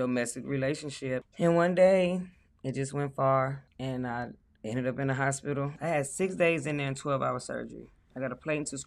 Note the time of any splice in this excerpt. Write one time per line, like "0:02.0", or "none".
0:01.3
0:03.7
0:05.7